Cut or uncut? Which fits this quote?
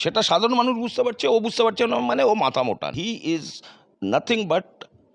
cut